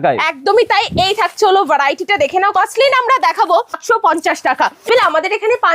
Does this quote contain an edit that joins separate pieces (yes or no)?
yes